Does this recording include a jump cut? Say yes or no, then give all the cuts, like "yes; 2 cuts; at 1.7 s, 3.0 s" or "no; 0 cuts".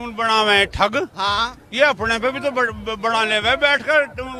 no; 0 cuts